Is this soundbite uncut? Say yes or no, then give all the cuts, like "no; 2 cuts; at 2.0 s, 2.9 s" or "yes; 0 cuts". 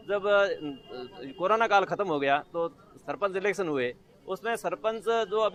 yes; 0 cuts